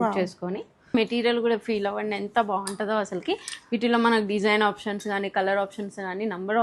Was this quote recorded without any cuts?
no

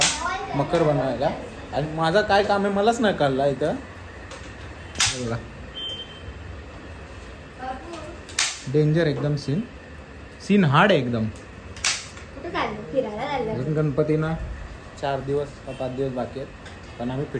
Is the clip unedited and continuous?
yes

